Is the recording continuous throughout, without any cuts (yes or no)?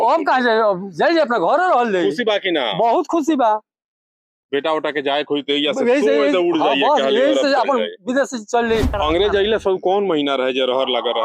no